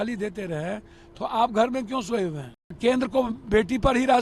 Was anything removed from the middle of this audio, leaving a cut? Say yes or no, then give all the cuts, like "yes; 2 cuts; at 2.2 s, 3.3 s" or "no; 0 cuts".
yes; 1 cut; at 2.8 s